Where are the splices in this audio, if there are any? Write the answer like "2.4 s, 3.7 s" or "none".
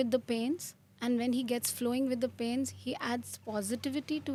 none